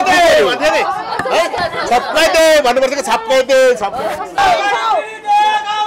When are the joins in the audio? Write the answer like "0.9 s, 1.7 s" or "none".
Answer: 4.4 s